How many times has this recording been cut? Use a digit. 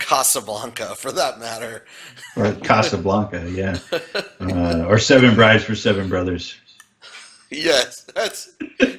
0